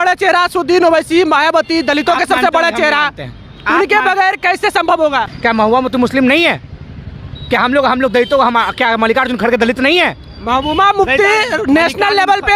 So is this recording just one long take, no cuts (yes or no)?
no